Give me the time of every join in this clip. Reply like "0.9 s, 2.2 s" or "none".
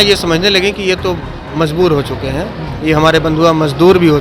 none